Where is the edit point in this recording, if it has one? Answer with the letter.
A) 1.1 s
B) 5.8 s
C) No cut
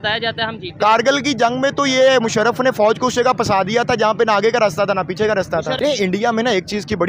B